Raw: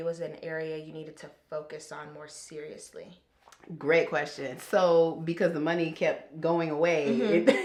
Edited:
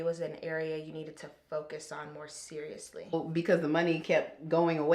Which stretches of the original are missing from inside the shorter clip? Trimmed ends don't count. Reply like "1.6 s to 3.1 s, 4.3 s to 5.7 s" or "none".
3.1 s to 5.1 s